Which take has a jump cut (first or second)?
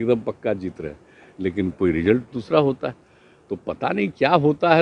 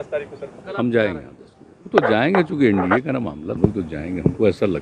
second